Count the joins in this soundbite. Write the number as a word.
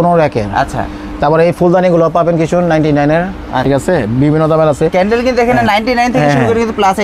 one